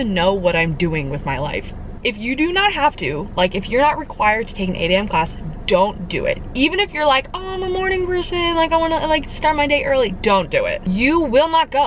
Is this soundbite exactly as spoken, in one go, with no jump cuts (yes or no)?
no